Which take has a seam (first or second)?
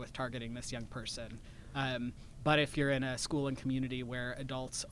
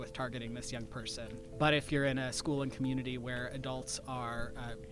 second